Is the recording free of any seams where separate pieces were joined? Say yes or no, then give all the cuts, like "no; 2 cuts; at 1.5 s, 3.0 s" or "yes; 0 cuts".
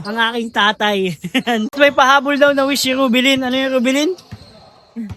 no; 1 cut; at 1.7 s